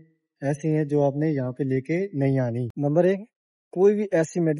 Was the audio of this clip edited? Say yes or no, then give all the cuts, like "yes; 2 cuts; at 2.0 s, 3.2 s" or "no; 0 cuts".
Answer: no; 0 cuts